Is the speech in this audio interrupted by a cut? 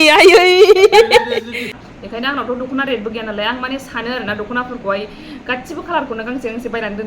yes; 1 cut; at 1.7 s

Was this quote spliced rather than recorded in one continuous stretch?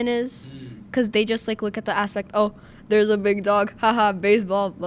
no; 0 cuts

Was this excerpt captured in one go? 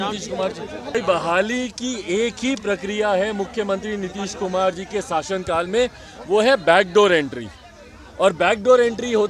no; 1 cut; at 0.9 s

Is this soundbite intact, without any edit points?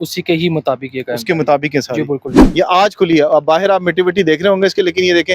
no; 1 cut; at 2.4 s

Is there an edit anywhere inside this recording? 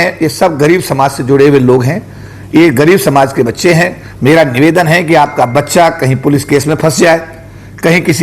no; 0 cuts

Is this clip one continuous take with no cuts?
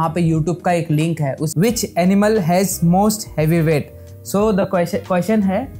no; 1 cut; at 1.4 s

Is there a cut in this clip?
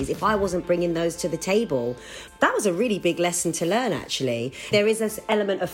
yes; 2 cuts; at 2.2 s, 4.7 s

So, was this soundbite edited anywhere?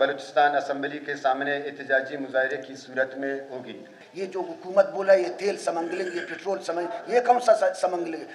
yes; 1 cut; at 4.0 s

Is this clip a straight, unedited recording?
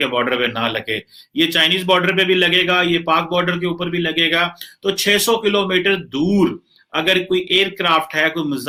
yes; 0 cuts

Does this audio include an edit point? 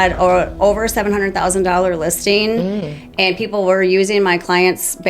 no; 0 cuts

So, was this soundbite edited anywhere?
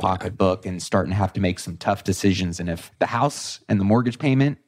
yes; 1 cut; at 2.8 s

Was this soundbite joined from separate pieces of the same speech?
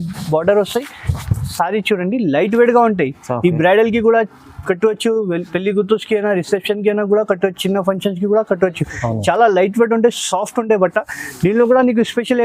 no; 0 cuts

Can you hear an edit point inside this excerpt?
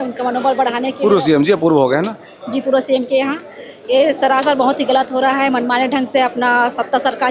no; 0 cuts

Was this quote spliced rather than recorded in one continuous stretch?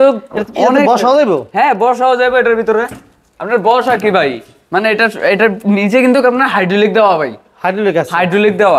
no; 0 cuts

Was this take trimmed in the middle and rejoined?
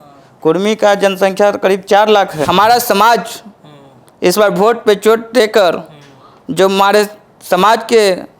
yes; 1 cut; at 2.4 s

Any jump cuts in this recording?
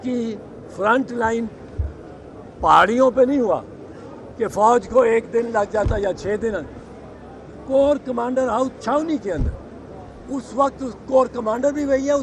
no; 0 cuts

